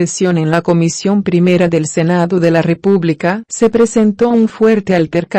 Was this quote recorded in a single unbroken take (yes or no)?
no